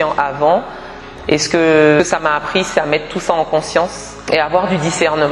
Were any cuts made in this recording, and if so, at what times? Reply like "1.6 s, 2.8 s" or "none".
2.0 s, 4.1 s